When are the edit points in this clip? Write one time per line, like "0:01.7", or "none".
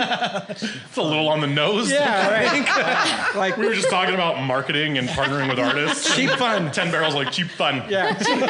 none